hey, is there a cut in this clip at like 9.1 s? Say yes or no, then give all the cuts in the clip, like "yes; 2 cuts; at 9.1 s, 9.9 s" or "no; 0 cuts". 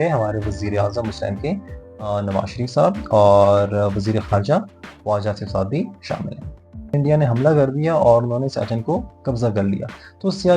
no; 1 cut; at 6.9 s